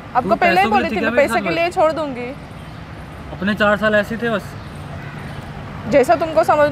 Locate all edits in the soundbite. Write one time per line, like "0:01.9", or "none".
none